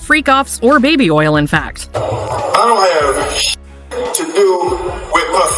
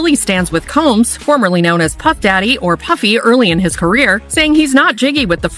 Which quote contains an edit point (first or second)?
first